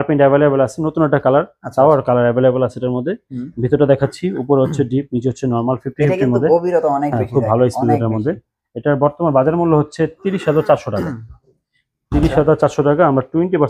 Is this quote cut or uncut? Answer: uncut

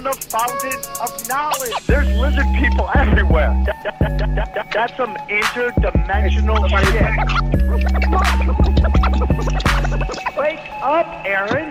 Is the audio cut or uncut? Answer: cut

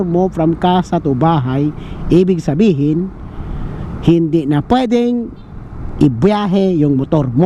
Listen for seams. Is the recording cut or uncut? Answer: uncut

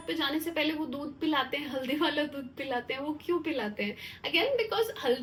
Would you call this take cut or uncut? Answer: uncut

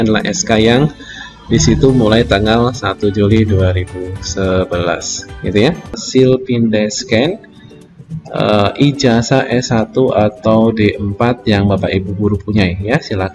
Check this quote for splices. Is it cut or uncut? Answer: cut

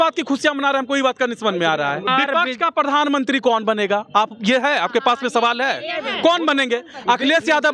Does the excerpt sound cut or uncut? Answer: cut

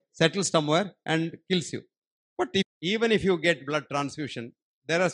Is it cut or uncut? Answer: cut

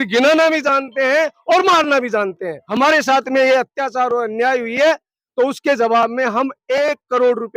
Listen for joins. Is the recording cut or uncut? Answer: cut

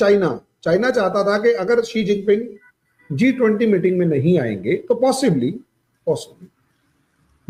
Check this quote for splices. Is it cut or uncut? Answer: uncut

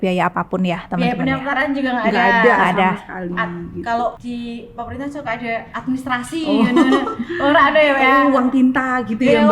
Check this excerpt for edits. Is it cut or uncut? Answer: cut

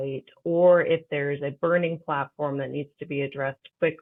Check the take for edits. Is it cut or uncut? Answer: uncut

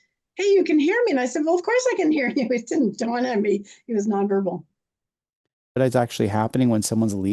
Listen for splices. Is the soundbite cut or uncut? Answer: cut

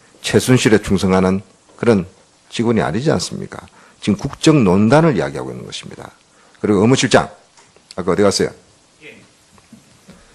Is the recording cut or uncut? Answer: cut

